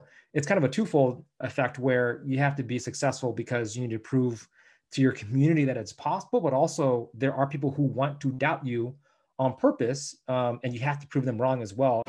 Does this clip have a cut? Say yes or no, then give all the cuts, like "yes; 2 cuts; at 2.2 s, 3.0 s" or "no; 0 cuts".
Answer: no; 0 cuts